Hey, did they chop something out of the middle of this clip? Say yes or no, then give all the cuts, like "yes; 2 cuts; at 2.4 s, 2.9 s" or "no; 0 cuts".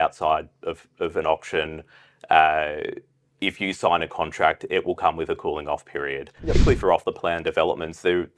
yes; 1 cut; at 6.6 s